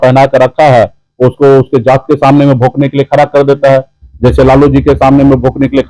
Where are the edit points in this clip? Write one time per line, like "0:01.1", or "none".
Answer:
none